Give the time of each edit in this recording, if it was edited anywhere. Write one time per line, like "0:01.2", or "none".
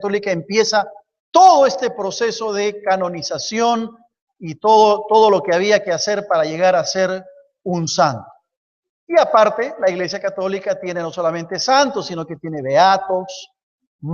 none